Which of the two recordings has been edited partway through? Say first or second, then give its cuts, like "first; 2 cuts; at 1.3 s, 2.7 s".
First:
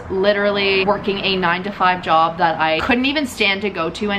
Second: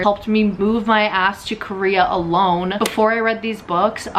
second; 1 cut; at 2.8 s